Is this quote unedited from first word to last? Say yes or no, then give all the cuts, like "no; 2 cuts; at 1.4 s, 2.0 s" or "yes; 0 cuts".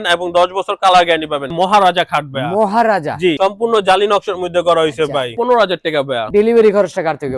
no; 3 cuts; at 1.5 s, 3.4 s, 5.6 s